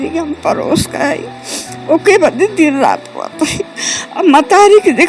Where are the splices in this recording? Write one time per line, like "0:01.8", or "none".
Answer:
none